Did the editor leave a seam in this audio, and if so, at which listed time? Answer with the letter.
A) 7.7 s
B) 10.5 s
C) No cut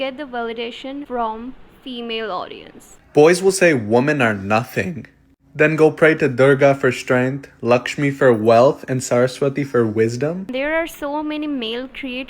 B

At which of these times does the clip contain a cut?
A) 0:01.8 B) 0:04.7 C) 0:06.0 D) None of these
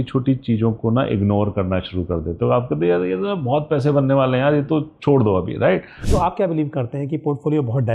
C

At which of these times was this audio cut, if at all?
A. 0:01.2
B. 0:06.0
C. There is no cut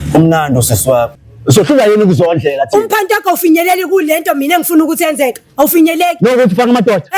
A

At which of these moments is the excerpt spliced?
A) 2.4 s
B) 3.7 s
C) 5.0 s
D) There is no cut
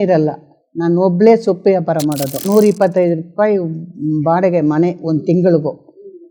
A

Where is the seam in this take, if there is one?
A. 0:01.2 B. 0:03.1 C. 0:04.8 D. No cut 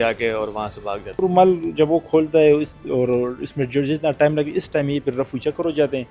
A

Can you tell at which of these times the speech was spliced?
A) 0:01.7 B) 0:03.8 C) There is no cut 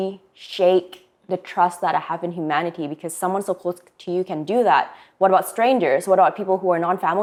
C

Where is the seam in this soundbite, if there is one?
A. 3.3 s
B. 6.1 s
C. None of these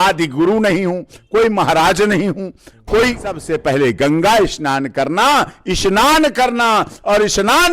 A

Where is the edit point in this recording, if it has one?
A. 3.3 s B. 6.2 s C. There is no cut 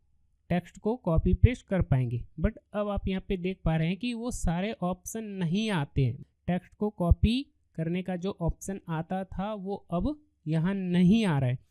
B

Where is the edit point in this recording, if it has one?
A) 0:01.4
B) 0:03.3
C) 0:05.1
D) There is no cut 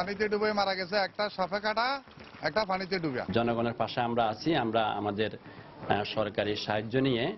B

